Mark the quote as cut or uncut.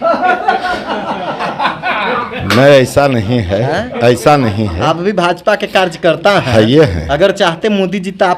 uncut